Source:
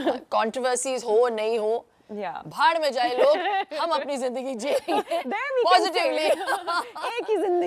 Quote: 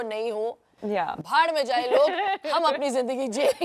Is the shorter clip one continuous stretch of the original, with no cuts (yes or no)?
yes